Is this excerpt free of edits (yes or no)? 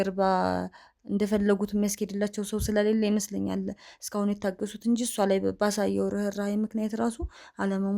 yes